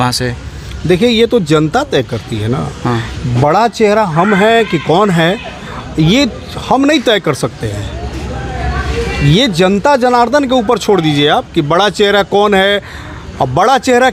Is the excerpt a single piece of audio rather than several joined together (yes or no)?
yes